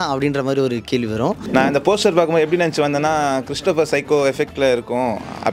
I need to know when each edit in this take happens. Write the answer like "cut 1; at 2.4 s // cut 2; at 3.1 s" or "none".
cut 1; at 1.4 s